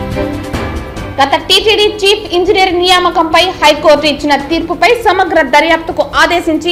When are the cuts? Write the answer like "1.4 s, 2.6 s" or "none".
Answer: none